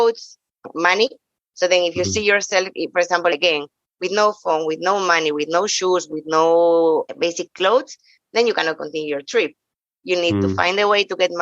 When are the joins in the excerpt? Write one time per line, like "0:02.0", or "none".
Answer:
0:03.3
0:07.1